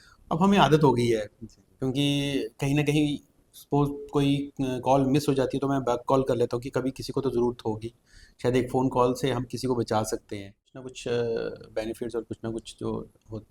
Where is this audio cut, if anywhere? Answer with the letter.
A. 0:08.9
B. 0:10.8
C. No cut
B